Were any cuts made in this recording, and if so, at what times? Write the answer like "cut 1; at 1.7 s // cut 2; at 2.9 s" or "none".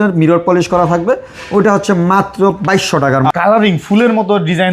cut 1; at 3.3 s

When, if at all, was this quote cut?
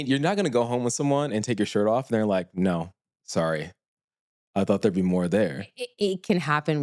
none

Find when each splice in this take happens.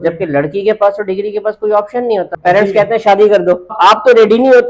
cut 1; at 2.3 s // cut 2; at 3.7 s

